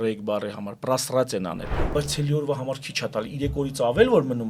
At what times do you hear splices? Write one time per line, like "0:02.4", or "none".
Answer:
0:01.9

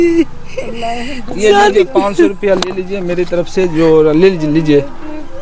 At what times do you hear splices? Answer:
none

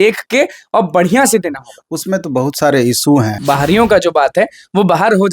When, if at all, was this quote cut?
0:03.4

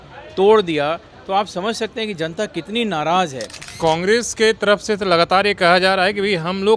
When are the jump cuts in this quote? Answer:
0:03.6

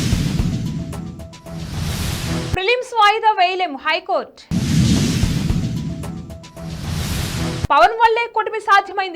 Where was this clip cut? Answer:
0:02.3

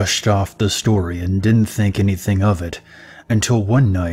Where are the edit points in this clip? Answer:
0:03.1

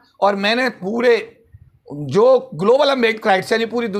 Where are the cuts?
none

